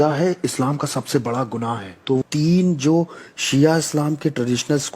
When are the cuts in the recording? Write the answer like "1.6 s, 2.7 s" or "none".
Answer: 2.2 s